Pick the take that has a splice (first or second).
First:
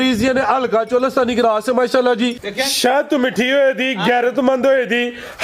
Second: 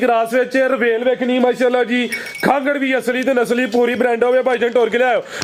first